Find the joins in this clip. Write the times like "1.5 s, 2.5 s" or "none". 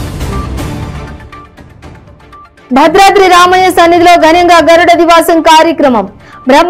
0.9 s, 2.4 s